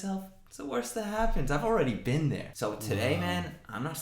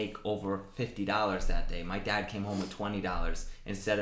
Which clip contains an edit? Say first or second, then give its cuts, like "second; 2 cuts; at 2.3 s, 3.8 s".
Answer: first; 1 cut; at 2.5 s